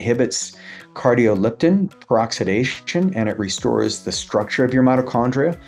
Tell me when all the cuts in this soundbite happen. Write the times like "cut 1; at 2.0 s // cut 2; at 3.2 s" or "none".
none